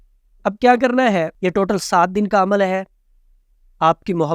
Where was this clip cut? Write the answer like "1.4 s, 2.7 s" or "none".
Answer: 1.3 s